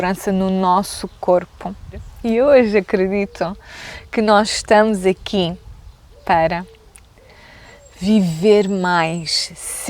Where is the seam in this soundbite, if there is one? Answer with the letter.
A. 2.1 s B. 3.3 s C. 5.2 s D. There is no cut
A